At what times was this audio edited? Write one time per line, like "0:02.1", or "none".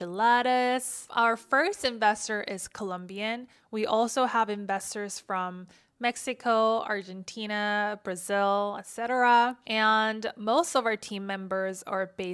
0:01.0

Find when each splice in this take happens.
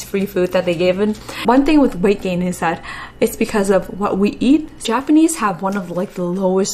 0:01.4
0:04.8

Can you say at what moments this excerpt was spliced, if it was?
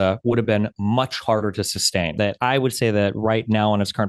0:02.1

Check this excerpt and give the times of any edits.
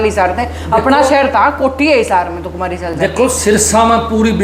none

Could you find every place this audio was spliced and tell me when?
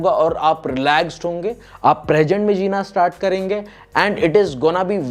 none

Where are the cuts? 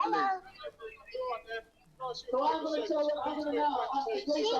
0:03.2

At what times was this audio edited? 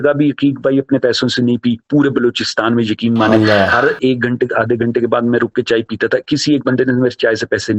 none

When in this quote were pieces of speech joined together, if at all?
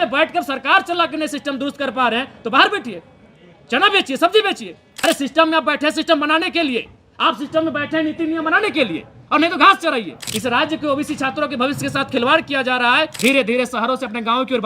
0:04.9
0:10.2
0:13.2

